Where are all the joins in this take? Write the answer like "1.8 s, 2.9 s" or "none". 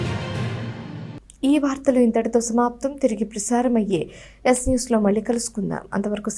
none